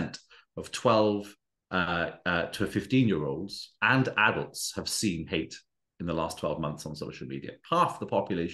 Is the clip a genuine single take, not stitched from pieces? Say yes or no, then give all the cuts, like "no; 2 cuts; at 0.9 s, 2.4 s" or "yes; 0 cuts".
yes; 0 cuts